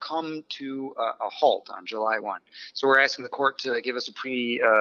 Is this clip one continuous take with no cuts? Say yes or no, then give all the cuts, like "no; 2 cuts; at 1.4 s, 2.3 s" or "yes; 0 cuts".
yes; 0 cuts